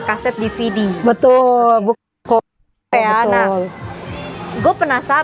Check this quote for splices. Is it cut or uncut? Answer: uncut